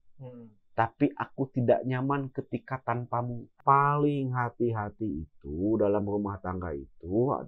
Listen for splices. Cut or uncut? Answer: cut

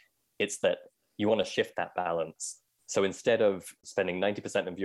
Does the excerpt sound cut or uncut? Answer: cut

